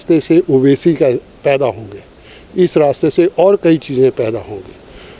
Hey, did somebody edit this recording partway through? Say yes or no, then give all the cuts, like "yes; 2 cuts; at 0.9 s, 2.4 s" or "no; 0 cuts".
no; 0 cuts